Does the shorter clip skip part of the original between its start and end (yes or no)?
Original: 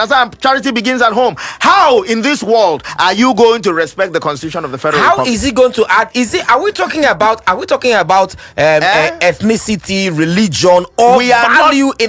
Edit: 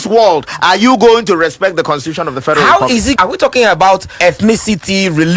yes